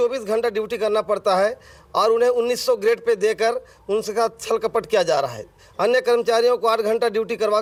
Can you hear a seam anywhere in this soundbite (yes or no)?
no